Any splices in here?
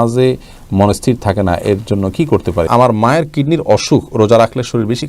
yes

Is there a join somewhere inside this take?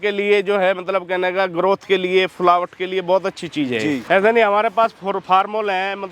yes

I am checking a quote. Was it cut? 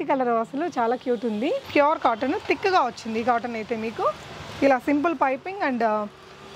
yes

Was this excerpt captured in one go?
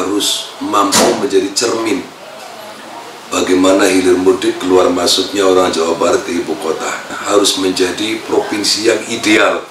no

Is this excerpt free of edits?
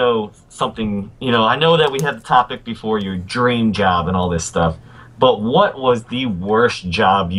yes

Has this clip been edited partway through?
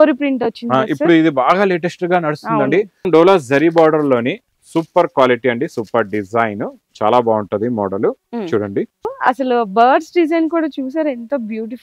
yes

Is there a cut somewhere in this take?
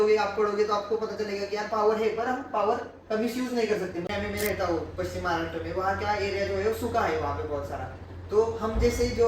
yes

